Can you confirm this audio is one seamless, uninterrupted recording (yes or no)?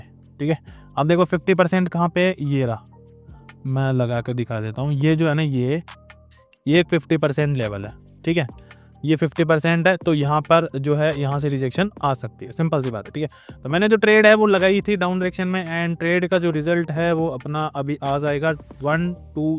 yes